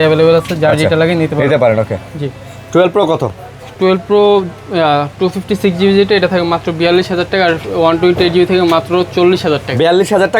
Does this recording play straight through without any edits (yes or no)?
yes